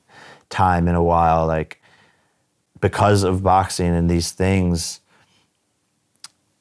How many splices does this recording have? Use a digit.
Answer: 0